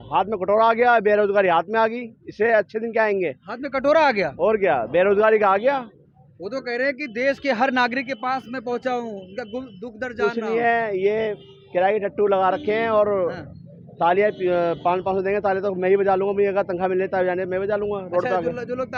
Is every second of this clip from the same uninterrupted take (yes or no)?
yes